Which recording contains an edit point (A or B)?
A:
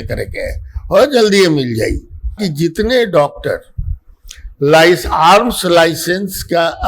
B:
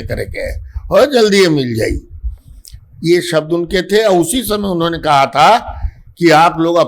A